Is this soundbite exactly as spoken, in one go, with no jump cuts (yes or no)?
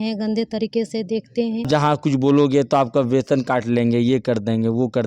no